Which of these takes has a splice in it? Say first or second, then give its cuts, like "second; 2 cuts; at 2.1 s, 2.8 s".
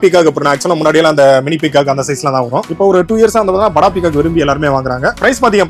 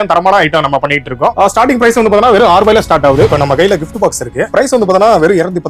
second; 3 cuts; at 1.3 s, 3.3 s, 4.5 s